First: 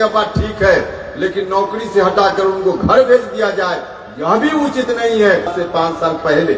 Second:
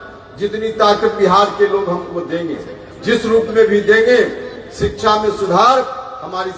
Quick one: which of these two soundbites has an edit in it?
first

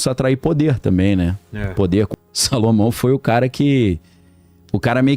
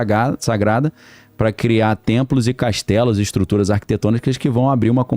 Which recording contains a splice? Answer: first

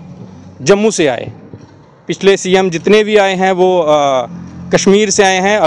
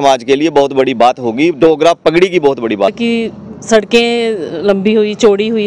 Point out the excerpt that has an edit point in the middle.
second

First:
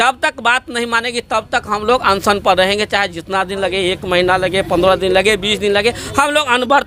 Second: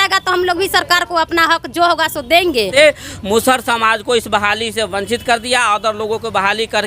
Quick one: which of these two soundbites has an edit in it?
second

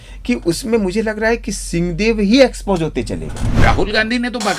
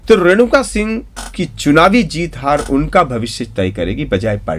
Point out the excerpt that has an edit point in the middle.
first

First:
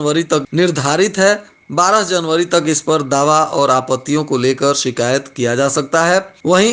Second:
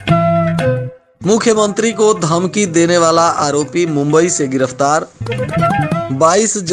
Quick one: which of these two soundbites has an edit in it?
second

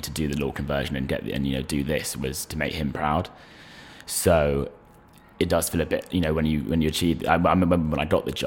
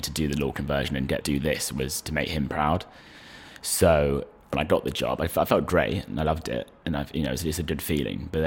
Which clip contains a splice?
second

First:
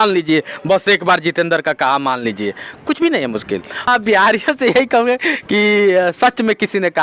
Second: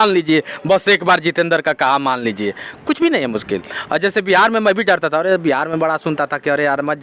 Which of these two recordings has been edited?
first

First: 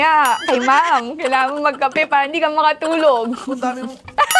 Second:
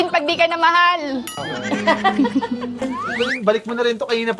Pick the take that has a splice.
second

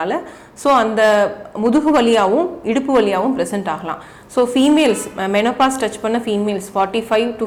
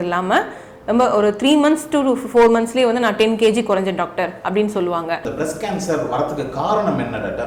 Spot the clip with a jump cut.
second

